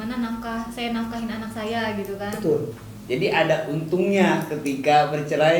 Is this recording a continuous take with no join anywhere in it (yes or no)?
no